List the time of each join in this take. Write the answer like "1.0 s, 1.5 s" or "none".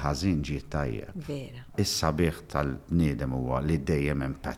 1.7 s